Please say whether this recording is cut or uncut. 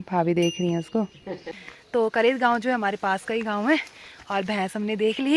cut